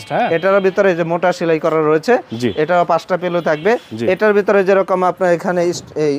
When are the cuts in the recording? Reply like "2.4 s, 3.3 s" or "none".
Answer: none